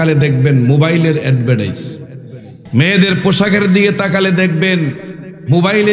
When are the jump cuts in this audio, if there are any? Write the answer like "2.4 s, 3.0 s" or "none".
2.6 s